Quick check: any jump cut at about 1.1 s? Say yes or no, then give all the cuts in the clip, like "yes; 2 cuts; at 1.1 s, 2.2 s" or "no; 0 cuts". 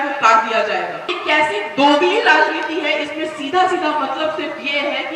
yes; 1 cut; at 1.1 s